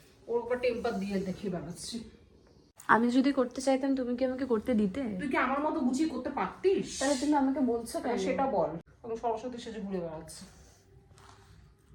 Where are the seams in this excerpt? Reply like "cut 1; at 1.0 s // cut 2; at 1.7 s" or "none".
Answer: none